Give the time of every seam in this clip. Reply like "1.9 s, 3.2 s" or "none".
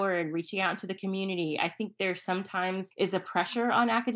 2.9 s